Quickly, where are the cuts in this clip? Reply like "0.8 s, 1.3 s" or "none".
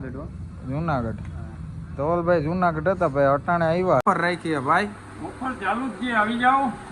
4.0 s